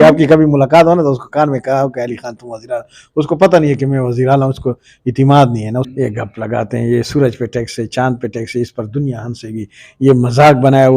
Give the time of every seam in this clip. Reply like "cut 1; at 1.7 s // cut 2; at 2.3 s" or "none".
cut 1; at 5.9 s